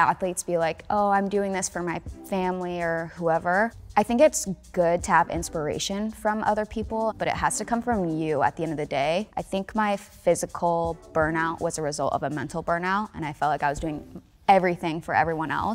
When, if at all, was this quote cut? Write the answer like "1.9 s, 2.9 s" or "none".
3.8 s, 7.2 s, 9.4 s